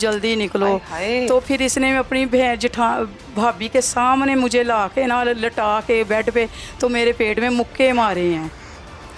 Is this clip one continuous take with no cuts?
yes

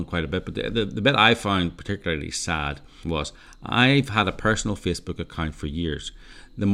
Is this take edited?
yes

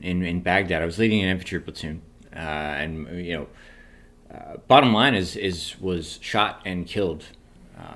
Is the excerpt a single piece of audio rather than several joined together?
yes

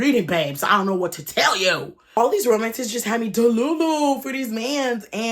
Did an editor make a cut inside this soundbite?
yes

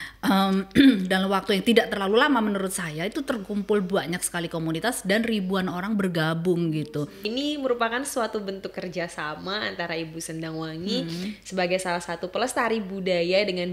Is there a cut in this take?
yes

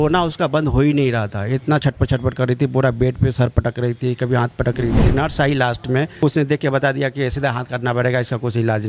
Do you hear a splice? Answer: yes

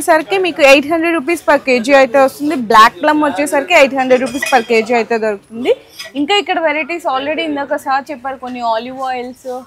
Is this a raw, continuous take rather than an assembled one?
yes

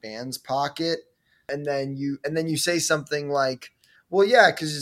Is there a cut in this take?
yes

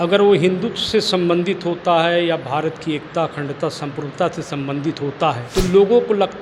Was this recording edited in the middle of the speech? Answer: yes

